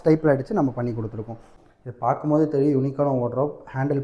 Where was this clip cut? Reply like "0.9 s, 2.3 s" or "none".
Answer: 1.5 s